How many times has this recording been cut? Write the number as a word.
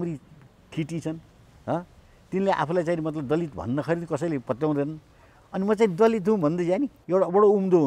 one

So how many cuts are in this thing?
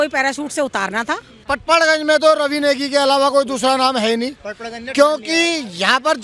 one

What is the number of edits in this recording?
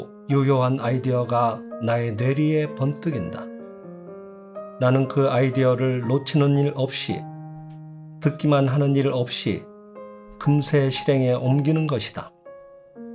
two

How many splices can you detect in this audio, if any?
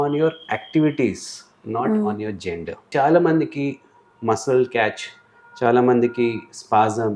one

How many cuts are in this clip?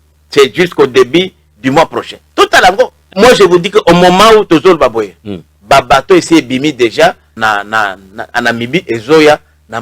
two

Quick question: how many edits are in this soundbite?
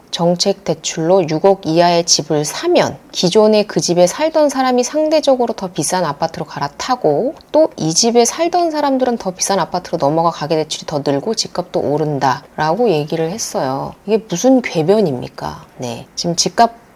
zero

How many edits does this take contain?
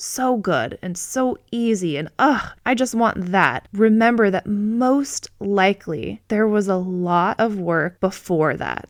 zero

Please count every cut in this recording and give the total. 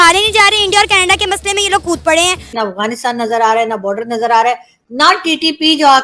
one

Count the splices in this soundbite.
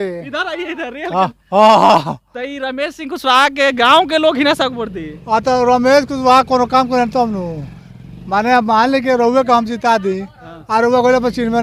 zero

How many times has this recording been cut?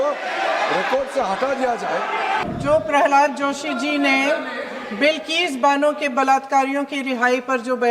one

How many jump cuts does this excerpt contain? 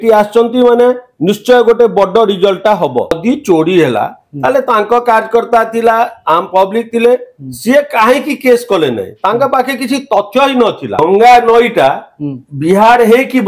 two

